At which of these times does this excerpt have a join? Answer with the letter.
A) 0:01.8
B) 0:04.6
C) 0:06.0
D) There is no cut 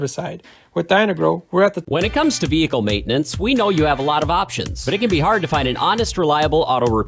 A